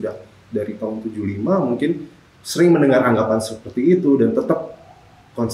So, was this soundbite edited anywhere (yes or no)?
no